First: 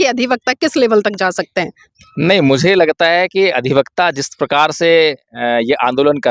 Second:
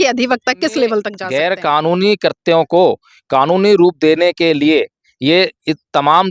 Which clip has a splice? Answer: second; 1 cut; at 1.2 s

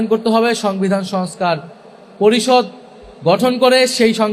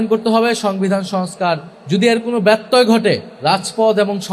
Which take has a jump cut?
second; 2 cuts; at 1.7 s, 3.3 s

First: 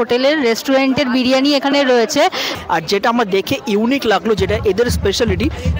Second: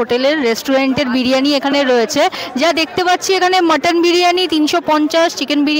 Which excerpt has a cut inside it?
first; 1 cut; at 2.5 s

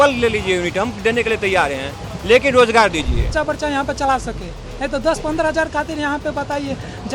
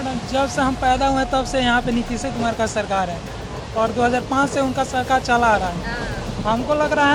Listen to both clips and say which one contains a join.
first; 1 cut; at 3.3 s

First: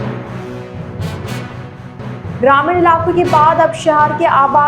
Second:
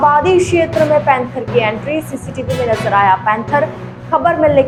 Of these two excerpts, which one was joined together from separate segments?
first; 1 cut; at 2.4 s

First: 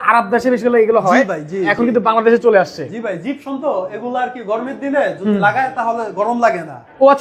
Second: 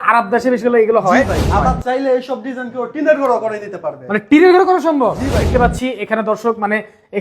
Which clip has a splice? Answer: second; 2 cuts; at 1.4 s, 5.5 s

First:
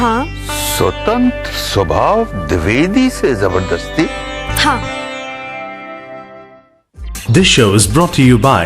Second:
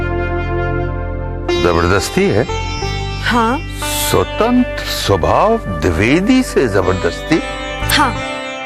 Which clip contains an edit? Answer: first; 1 cut; at 6.5 s

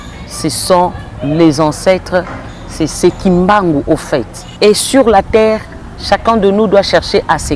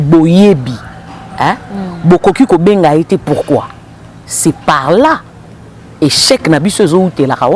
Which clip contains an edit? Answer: first; 1 cut; at 4.5 s

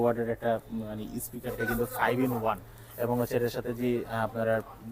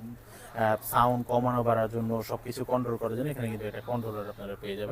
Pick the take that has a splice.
first; 1 cut; at 1.5 s

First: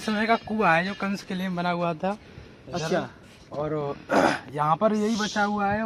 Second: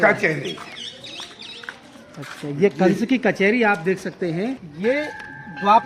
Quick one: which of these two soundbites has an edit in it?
second; 1 cut; at 4.7 s

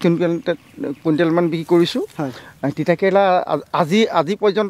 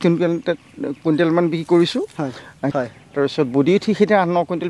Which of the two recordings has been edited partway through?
second; 1 cut; at 2.7 s

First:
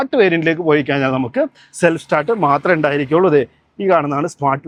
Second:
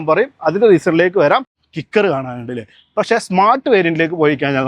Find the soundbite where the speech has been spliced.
second; 1 cut; at 1.6 s

